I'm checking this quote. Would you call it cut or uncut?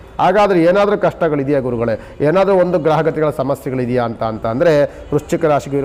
uncut